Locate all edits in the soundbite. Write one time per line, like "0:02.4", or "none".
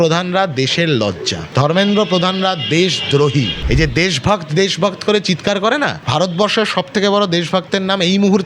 0:01.4
0:03.6
0:06.0

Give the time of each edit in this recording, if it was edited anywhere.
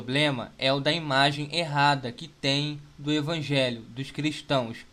none

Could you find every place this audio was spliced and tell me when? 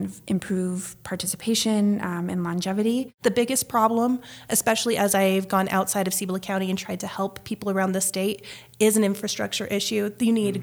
0:03.1

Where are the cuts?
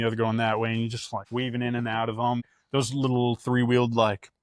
0:01.1
0:02.4

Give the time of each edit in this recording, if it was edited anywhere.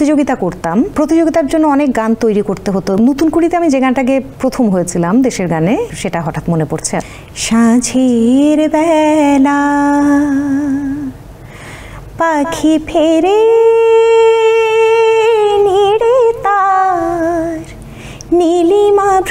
0:00.9
0:03.0
0:04.3
0:05.9
0:07.0

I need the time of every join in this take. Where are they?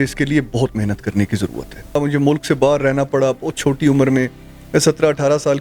0:02.0

